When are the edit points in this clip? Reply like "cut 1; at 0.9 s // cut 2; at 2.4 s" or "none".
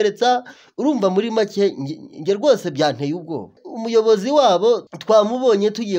cut 1; at 3.6 s // cut 2; at 4.9 s